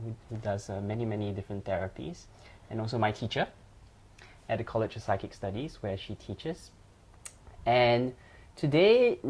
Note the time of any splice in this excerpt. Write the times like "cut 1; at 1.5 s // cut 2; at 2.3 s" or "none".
cut 1; at 4.5 s